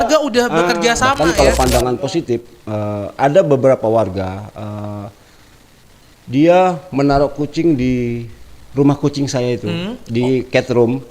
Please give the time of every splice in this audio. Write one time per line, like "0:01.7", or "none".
0:01.2